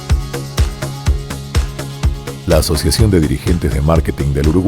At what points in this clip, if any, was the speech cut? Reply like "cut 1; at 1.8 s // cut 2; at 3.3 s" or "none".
cut 1; at 2.0 s

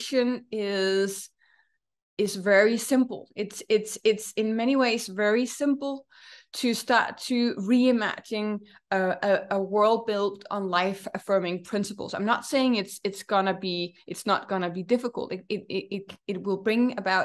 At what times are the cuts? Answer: none

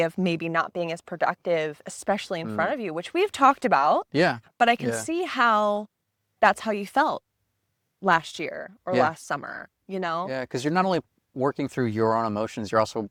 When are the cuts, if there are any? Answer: none

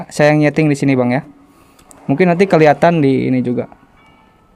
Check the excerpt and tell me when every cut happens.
none

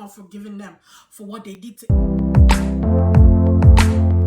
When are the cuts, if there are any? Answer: cut 1; at 1.6 s

